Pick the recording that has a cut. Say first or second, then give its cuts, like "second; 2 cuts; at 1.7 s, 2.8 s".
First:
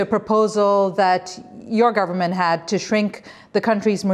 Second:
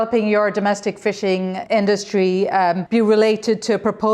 second; 2 cuts; at 1.6 s, 2.8 s